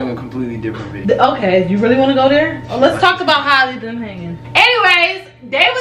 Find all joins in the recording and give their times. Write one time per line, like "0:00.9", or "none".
0:00.9
0:04.4

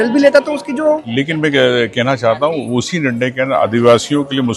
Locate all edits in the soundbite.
0:01.1

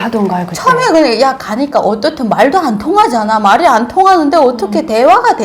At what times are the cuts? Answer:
none

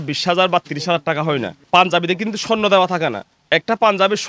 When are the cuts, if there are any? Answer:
none

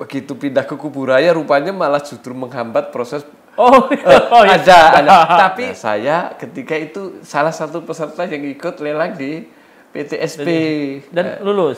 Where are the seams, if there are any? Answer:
0:05.6

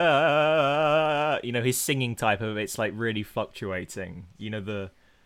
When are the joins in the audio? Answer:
none

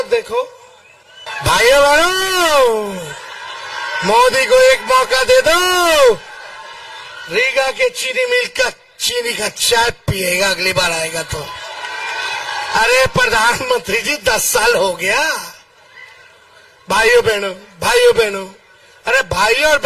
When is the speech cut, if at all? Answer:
0:01.2

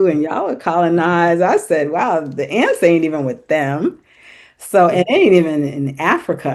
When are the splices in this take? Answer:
none

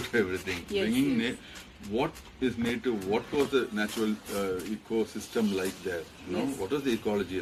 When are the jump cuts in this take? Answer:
none

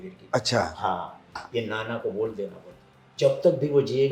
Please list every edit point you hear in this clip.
0:01.4

